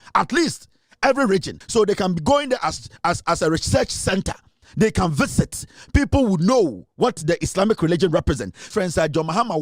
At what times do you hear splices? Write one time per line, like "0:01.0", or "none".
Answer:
0:01.6
0:08.6